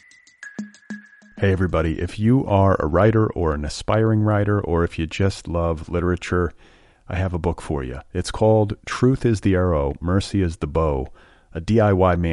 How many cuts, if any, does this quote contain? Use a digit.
1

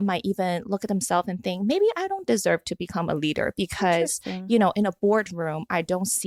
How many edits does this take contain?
0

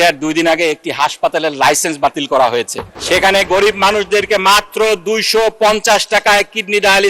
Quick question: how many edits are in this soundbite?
1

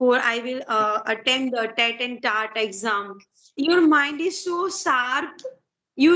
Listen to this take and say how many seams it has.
1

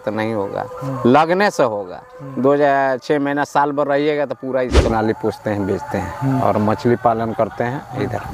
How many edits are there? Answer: 1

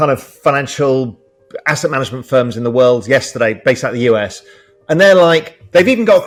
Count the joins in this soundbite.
0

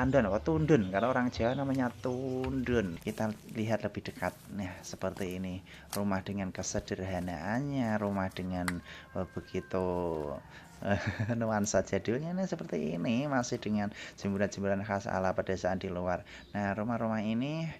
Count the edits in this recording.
1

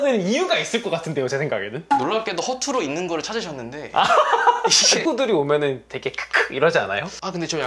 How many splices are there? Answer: 1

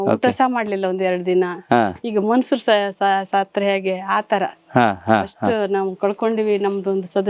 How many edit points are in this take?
0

